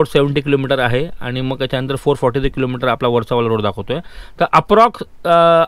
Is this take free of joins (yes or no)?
yes